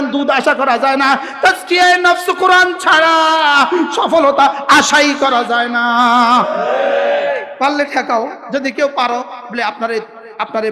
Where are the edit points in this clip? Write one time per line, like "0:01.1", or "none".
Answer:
0:07.5
0:08.4